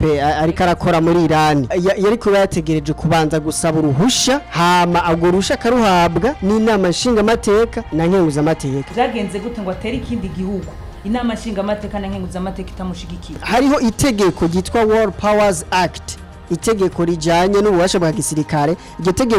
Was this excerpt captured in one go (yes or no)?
no